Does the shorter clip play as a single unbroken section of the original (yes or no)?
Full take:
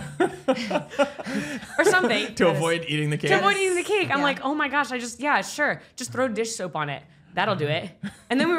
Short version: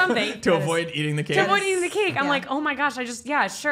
yes